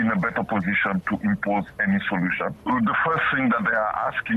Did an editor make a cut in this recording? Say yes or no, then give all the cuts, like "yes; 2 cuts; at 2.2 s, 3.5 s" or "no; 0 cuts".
no; 0 cuts